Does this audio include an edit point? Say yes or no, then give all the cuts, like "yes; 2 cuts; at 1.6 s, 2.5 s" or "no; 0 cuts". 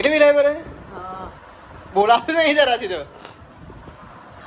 no; 0 cuts